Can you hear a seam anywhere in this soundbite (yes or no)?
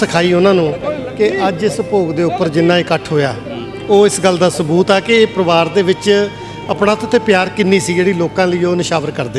no